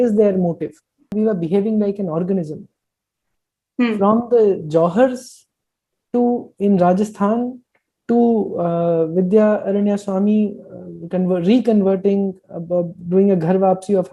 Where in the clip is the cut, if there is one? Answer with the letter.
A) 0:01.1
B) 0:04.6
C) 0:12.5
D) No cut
A